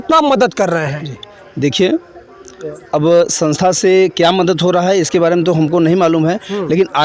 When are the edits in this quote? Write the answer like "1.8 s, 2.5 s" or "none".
none